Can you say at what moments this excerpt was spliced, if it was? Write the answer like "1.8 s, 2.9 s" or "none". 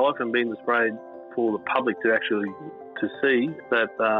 none